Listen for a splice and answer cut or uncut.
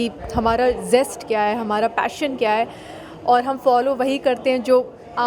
uncut